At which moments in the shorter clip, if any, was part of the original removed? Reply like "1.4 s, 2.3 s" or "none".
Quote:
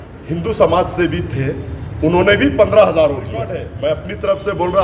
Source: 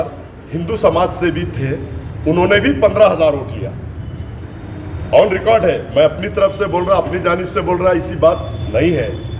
3.6 s